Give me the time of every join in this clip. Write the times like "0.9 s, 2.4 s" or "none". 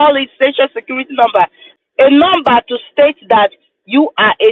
1.7 s